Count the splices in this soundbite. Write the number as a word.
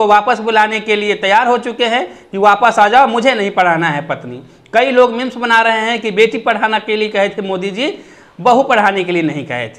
zero